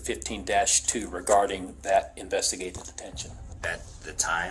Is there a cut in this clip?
no; 0 cuts

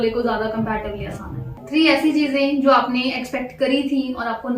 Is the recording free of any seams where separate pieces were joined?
no; 1 cut; at 1.6 s

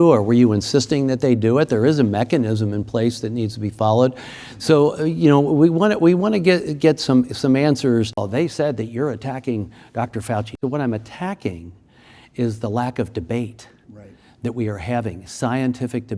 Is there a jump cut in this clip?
yes; 2 cuts; at 8.2 s, 10.6 s

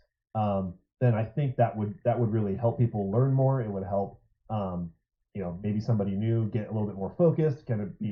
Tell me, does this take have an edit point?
no; 0 cuts

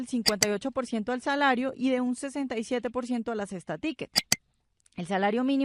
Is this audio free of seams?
yes; 0 cuts

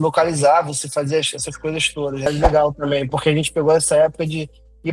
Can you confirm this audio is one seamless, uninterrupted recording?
no; 1 cut; at 2.3 s

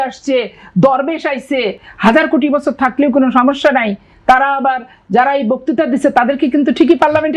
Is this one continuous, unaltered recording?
yes; 0 cuts

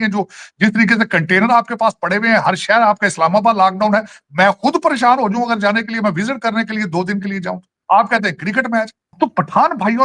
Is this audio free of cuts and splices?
no; 2 cuts; at 7.8 s, 9.2 s

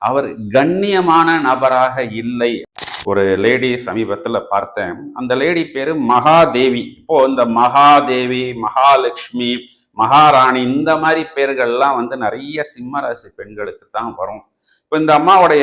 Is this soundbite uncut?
no; 1 cut; at 2.7 s

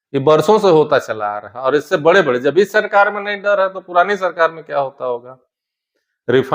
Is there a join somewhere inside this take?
no; 0 cuts

